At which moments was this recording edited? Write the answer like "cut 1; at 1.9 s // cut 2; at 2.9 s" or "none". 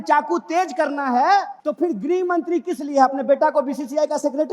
cut 1; at 1.6 s

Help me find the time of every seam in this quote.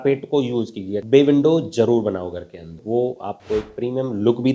cut 1; at 1.0 s // cut 2; at 2.8 s

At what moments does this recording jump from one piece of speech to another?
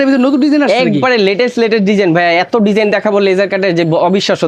none

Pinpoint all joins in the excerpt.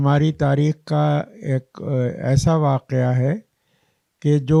none

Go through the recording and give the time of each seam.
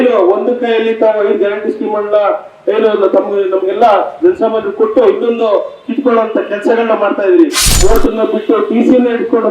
cut 1; at 7.7 s

